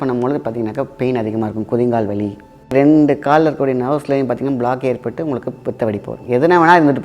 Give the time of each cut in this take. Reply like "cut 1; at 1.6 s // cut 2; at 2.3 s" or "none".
cut 1; at 2.7 s

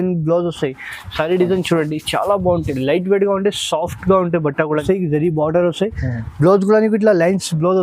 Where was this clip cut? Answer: cut 1; at 4.8 s

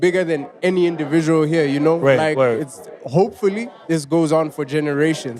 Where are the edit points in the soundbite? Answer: cut 1; at 3.7 s

